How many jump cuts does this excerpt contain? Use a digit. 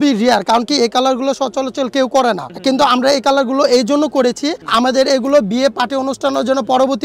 0